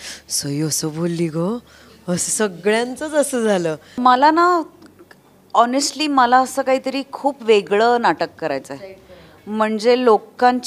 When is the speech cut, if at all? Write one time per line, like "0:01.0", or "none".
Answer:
0:03.9